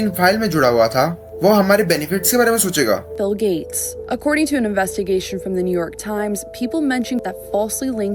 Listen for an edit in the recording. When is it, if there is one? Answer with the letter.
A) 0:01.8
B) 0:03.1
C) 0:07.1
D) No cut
B